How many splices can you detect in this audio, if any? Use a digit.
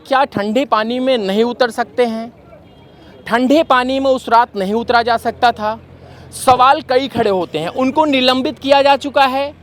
0